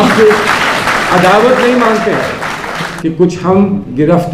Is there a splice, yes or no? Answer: yes